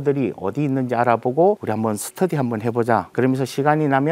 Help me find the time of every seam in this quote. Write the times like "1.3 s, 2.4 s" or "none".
1.6 s, 3.1 s